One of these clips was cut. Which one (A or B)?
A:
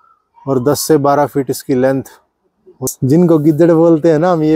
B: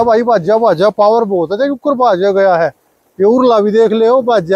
A